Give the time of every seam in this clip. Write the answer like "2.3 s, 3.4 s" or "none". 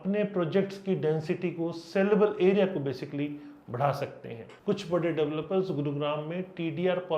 4.4 s